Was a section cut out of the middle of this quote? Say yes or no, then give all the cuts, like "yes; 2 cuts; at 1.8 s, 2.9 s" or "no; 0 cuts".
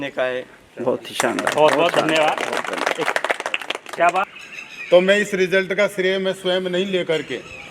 yes; 1 cut; at 4.2 s